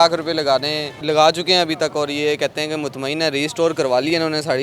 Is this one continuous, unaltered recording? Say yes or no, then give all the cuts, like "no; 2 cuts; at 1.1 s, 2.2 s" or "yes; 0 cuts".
no; 1 cut; at 1.0 s